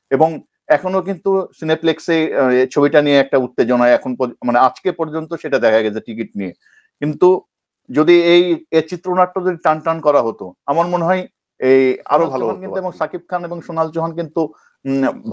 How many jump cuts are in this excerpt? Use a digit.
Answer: 1